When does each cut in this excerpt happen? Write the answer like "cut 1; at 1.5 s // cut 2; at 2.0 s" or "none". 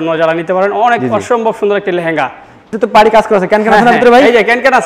cut 1; at 2.7 s